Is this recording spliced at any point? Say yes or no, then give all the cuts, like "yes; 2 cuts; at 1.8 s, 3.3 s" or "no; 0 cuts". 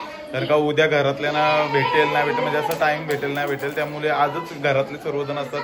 no; 0 cuts